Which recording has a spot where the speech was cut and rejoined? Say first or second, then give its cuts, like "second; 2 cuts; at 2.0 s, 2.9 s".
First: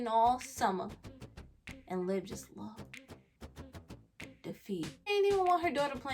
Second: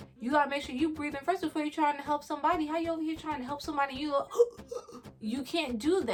first; 1 cut; at 5.1 s